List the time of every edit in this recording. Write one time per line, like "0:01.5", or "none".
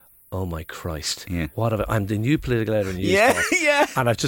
none